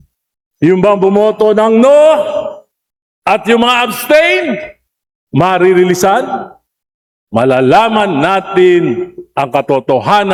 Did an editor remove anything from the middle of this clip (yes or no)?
no